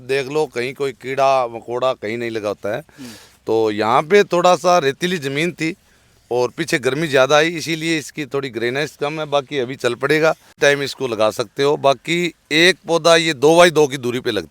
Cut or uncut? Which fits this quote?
cut